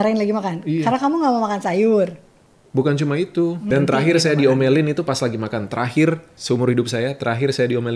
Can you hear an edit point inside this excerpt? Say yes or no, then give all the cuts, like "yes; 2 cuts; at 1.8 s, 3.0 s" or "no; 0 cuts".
yes; 2 cuts; at 3.6 s, 6.3 s